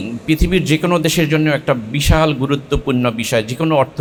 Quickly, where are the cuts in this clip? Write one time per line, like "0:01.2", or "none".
none